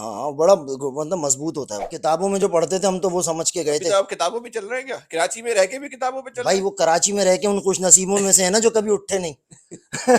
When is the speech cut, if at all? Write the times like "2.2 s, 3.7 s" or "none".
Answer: 1.8 s